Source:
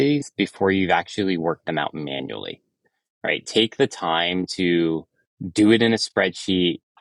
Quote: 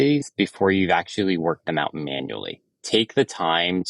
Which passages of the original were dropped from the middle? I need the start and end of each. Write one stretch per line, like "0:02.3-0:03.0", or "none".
0:02.8-0:03.4